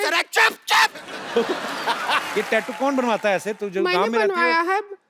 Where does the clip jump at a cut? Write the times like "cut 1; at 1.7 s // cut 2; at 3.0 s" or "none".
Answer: cut 1; at 2.3 s